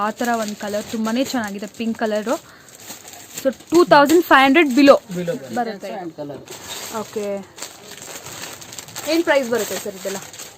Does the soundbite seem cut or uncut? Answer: cut